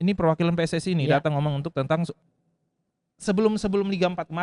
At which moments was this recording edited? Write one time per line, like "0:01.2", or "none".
0:02.2